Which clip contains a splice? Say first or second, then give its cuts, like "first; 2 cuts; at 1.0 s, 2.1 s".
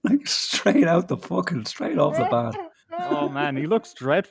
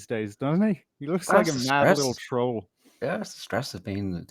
first; 1 cut; at 3.2 s